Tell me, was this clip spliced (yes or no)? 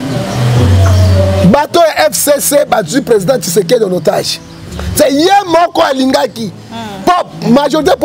no